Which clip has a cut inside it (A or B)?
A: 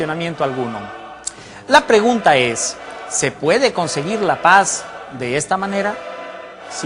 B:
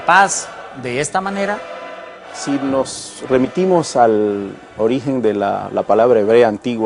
B